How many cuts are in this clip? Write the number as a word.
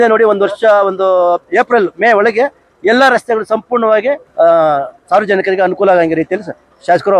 one